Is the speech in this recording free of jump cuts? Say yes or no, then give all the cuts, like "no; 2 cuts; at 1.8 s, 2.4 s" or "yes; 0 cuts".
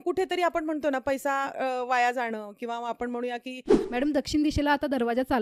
no; 1 cut; at 3.7 s